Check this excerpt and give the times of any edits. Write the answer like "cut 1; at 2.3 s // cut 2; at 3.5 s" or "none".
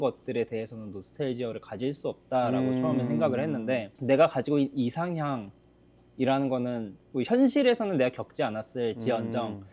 cut 1; at 3.9 s // cut 2; at 6.9 s